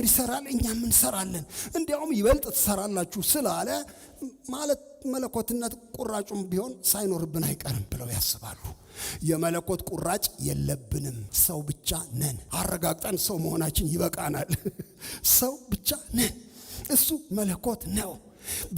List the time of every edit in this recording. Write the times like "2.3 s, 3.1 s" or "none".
7.9 s, 11.3 s, 12.4 s